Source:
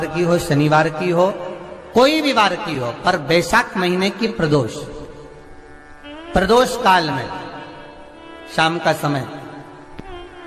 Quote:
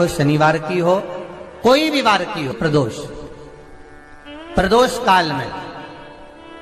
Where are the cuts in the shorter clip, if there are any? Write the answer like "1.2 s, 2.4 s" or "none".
2.5 s

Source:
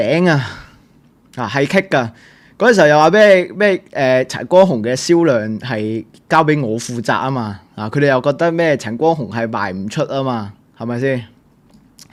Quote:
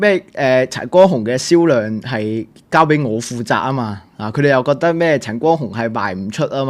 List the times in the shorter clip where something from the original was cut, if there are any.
none

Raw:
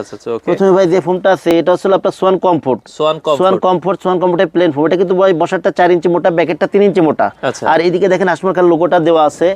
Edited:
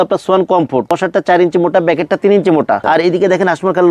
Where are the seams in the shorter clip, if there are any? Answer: 0.9 s, 2.8 s

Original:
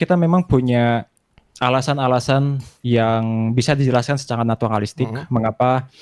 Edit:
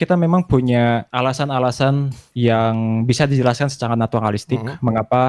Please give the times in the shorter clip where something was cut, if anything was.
1.1 s

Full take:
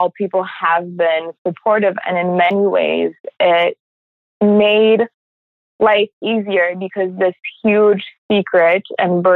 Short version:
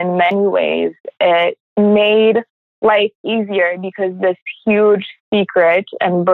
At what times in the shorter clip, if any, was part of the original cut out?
1.6 s, 2.6 s

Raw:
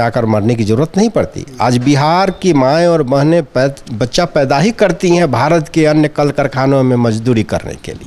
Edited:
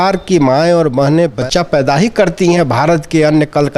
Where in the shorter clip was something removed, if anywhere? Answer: 1.4 s

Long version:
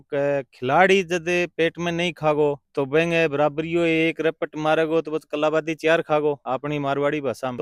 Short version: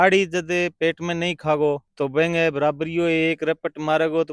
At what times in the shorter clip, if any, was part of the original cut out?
none

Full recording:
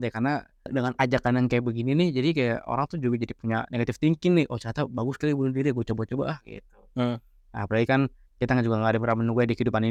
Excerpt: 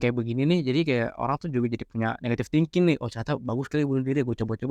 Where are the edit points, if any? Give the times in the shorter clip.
none

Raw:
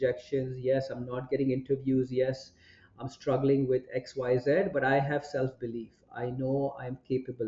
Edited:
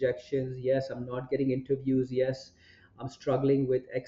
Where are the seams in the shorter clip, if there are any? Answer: none

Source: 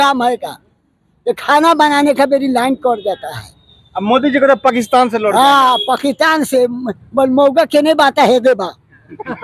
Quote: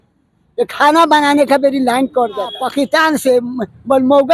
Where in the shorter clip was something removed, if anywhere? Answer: 2.6 s

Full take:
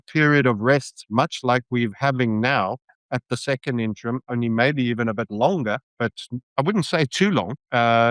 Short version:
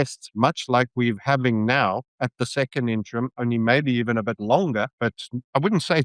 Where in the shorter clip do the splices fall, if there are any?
2.1 s, 5.1 s

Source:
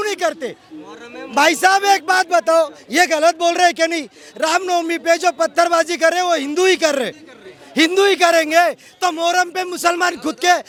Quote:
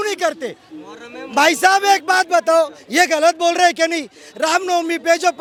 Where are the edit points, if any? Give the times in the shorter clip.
none

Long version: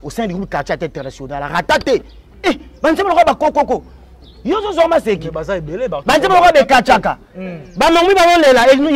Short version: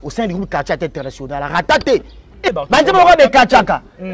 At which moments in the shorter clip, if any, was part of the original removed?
2.5 s

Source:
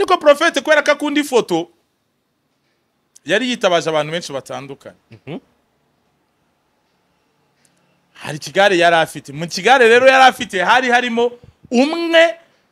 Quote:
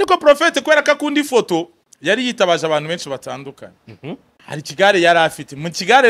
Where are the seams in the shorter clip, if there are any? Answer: 1.8 s, 4.3 s

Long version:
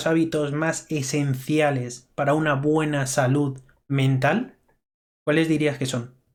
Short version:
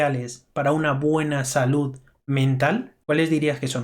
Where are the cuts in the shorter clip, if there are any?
2.9 s

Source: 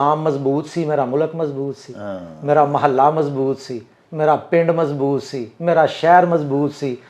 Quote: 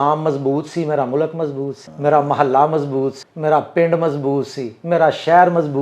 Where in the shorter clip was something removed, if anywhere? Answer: 1.8 s, 3.2 s

